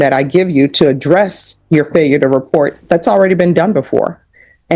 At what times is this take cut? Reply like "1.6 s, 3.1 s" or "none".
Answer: none